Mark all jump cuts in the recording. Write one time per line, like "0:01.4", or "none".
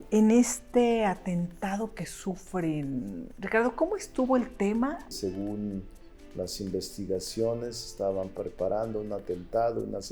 0:05.1